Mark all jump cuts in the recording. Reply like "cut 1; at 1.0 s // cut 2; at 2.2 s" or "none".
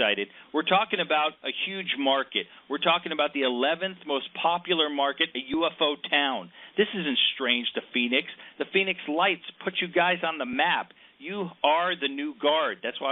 cut 1; at 12.1 s